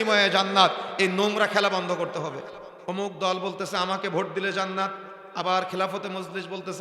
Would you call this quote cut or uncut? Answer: cut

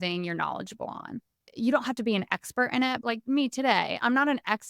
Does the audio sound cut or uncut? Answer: cut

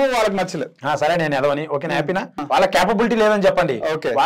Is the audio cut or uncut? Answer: cut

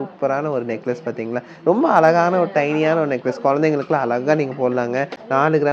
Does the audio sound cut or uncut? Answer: uncut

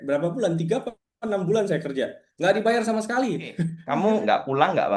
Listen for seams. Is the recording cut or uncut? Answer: cut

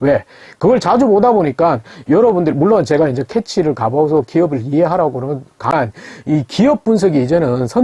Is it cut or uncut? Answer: cut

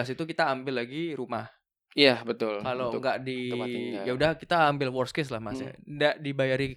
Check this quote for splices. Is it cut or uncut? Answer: uncut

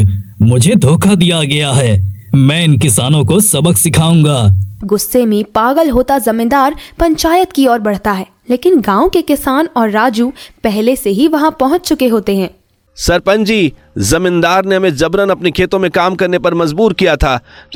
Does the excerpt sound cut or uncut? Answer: uncut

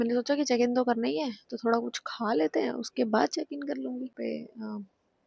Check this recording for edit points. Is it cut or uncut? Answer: cut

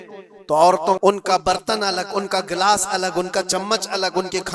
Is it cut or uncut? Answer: cut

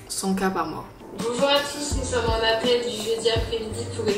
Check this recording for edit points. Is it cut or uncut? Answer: cut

